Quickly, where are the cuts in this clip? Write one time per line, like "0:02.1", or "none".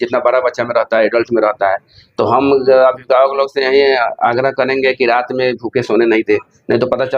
none